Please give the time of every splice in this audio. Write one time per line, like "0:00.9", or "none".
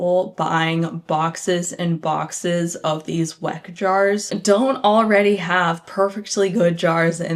none